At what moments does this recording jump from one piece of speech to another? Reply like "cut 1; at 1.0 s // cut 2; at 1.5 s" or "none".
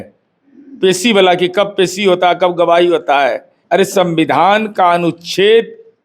cut 1; at 3.5 s